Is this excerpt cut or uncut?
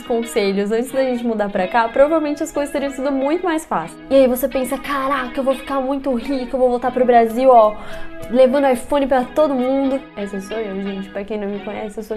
cut